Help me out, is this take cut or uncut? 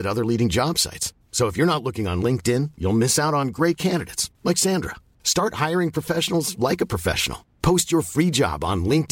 uncut